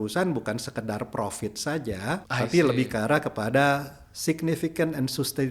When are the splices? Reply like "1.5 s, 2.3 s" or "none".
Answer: 2.3 s